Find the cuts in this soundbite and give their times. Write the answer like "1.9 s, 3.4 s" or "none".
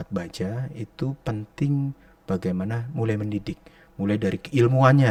none

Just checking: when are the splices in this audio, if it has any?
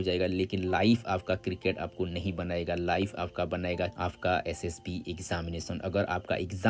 none

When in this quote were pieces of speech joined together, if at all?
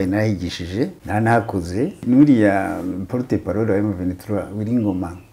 1.0 s, 2.0 s

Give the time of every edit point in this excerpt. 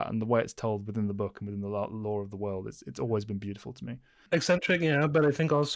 4.2 s

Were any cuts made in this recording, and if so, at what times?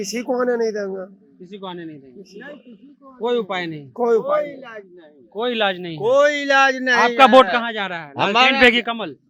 none

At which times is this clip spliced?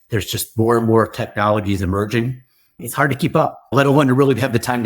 3.7 s

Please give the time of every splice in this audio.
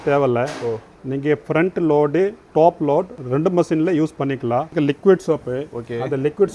3.2 s, 4.7 s

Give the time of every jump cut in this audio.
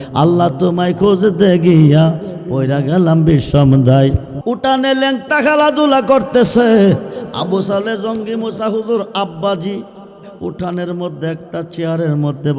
4.3 s

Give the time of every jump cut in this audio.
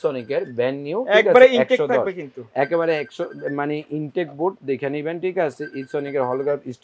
none

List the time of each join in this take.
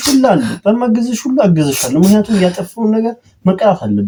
none

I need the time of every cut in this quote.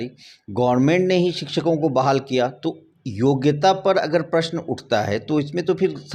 none

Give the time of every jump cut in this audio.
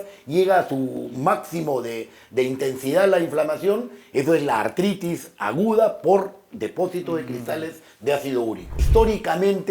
8.8 s

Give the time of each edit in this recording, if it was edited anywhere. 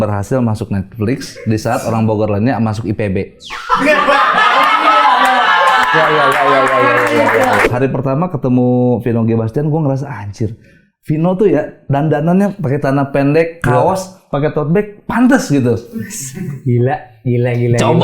7.7 s

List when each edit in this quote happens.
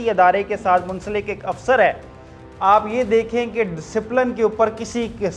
none

